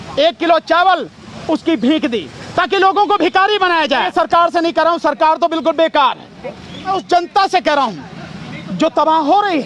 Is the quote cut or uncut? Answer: cut